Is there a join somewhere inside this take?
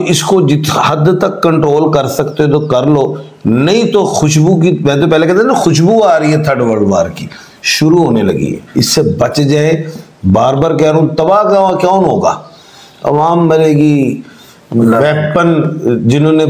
no; 0 cuts

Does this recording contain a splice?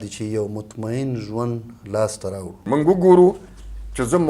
yes; 1 cut; at 2.5 s

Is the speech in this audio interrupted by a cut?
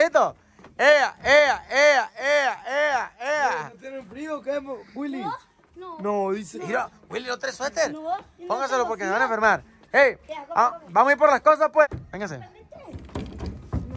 no; 0 cuts

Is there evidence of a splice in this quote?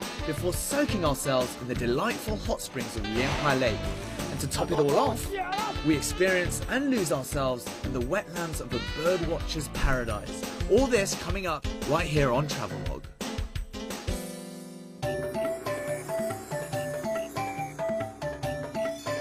no; 0 cuts

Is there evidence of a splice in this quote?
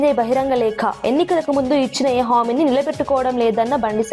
no; 0 cuts

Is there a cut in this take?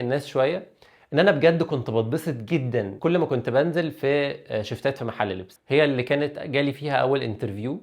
yes; 2 cuts; at 2.9 s, 5.5 s

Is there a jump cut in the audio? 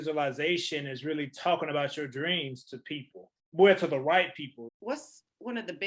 yes; 1 cut; at 4.7 s

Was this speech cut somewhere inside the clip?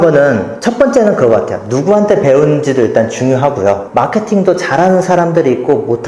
yes; 1 cut; at 3.8 s

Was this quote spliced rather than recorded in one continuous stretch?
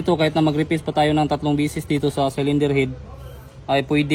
no; 0 cuts

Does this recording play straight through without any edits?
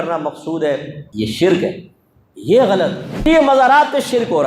no; 2 cuts; at 1.0 s, 3.1 s

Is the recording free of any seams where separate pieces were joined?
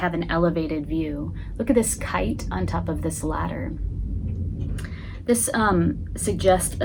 yes; 0 cuts

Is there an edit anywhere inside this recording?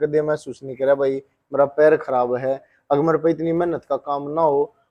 no; 0 cuts

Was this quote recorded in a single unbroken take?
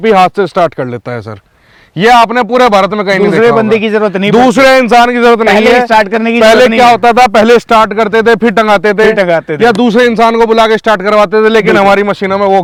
yes; 0 cuts

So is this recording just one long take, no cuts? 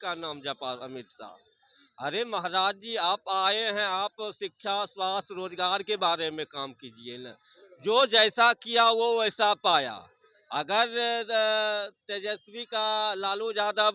yes; 0 cuts

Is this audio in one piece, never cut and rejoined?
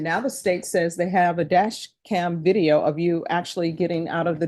yes; 0 cuts

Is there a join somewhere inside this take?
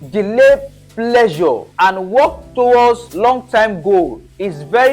yes; 2 cuts; at 1.7 s, 3.1 s

